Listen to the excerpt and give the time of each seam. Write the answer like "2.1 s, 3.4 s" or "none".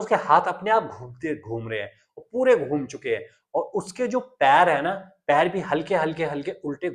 none

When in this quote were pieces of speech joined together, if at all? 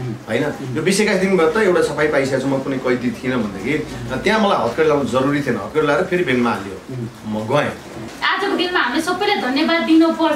8.1 s

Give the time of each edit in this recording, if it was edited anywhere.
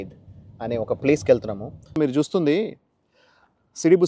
1.9 s

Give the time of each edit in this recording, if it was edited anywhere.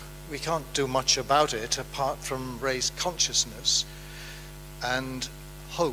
1.5 s

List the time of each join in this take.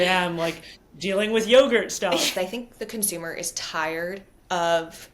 2.3 s

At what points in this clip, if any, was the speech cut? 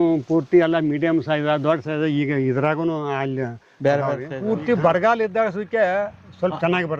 4.3 s

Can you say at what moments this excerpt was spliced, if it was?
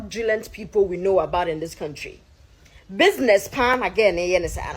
none

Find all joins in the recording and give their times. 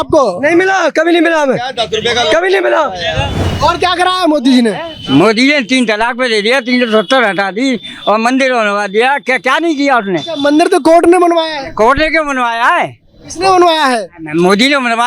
3.4 s

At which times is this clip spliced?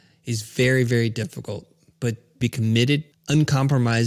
2.3 s, 3.1 s

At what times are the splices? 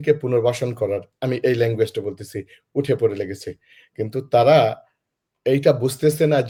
none

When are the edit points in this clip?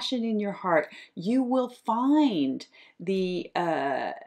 none

